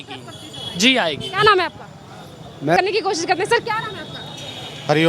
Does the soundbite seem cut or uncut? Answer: uncut